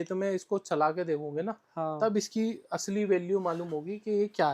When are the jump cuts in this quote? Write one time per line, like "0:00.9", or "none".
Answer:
none